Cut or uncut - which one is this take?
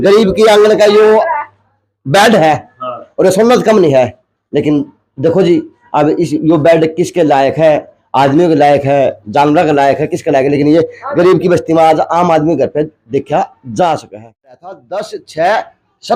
cut